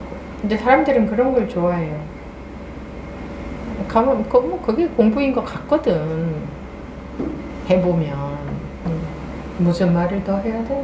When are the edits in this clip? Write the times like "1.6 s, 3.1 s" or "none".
8.7 s

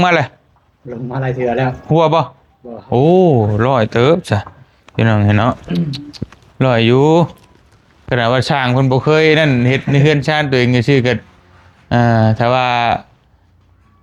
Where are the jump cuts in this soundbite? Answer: none

